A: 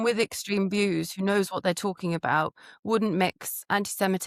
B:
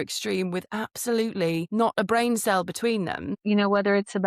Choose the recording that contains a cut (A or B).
B